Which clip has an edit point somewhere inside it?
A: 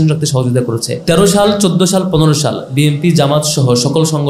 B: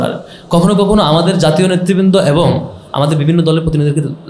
A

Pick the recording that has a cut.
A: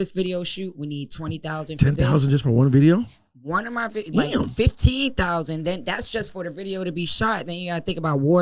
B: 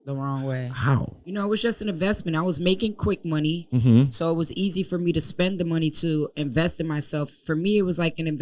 B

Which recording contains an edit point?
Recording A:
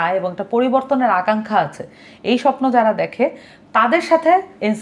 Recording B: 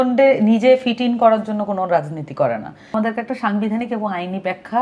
B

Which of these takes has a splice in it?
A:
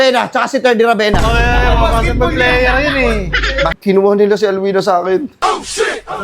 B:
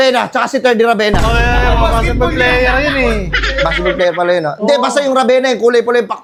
A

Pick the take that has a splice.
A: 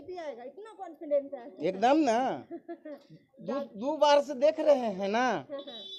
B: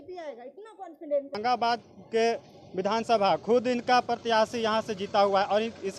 B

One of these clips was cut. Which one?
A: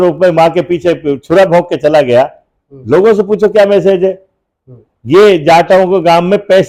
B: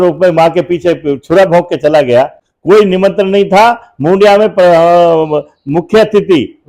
B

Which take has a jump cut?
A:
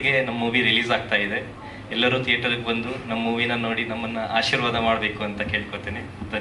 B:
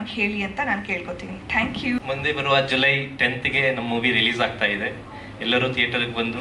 B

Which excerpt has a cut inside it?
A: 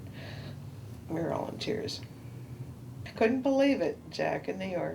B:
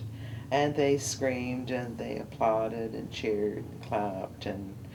A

